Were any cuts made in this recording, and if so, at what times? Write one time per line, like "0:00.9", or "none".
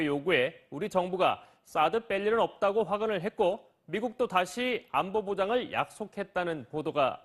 0:01.3

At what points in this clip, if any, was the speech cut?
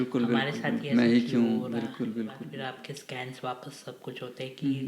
0:02.5

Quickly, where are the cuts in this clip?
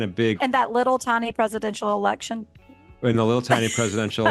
none

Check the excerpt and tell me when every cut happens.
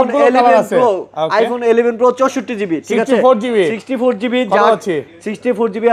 none

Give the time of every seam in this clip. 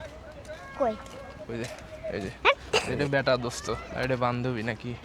0:02.9
0:03.9

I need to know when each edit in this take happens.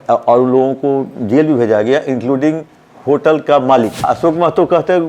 0:04.0

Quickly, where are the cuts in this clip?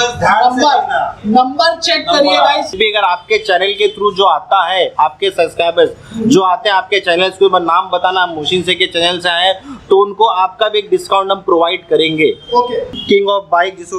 0:02.8
0:12.9

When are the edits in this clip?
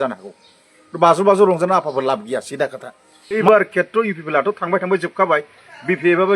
0:03.4

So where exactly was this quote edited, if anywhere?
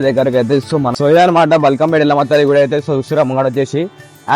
0:00.9

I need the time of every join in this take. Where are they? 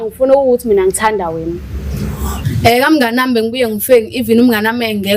0:02.3

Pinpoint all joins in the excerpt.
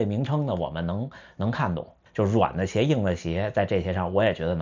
0:02.0

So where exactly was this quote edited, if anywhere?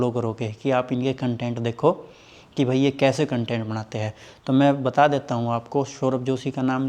none

